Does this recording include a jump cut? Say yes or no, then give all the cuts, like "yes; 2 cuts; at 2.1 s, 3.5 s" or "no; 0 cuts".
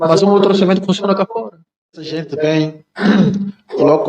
yes; 1 cut; at 2.0 s